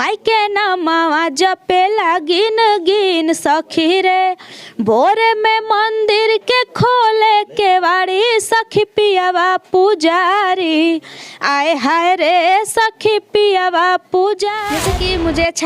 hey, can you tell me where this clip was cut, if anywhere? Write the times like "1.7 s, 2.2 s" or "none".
14.7 s